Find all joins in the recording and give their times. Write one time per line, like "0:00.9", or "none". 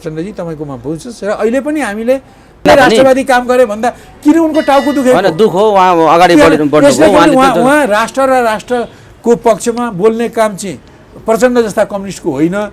0:02.6

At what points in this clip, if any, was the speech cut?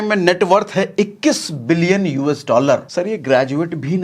0:02.9

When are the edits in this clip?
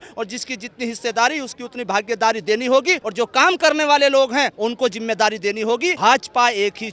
0:03.0
0:04.5
0:06.0

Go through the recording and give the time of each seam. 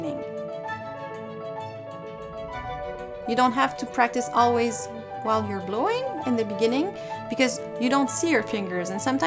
none

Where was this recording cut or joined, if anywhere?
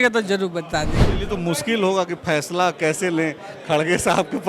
0:01.0

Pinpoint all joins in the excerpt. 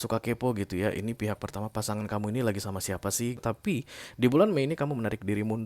0:03.4

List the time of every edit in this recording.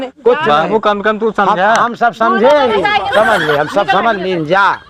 none

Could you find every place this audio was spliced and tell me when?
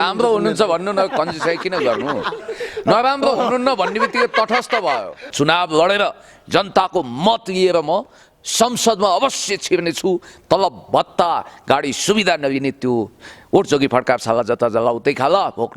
0:05.3

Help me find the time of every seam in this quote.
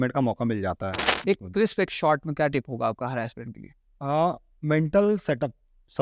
0:01.1

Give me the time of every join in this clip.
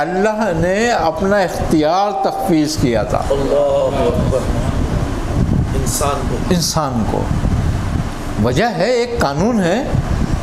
none

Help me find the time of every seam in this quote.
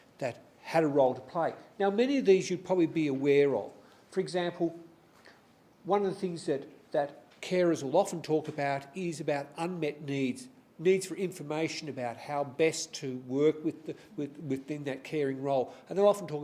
0:03.0

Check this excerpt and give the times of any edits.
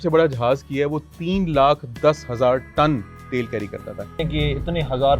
0:04.3

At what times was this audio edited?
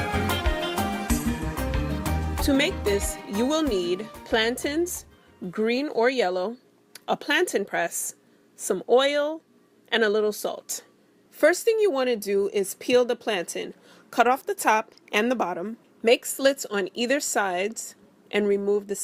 0:16.2

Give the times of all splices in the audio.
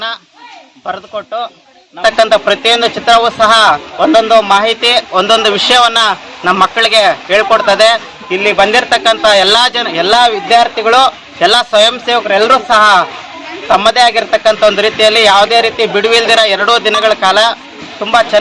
0:02.0

